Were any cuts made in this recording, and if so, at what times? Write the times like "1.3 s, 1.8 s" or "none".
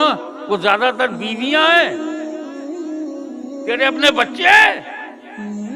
1.9 s, 3.6 s, 4.8 s